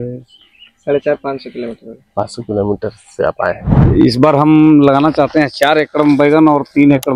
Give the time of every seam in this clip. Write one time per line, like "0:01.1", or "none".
0:03.7